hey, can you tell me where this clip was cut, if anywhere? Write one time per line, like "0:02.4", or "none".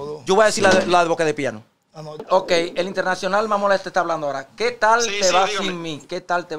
0:02.2